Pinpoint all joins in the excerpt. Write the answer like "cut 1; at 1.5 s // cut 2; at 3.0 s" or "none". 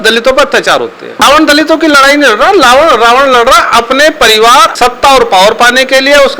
cut 1; at 1.1 s // cut 2; at 4.7 s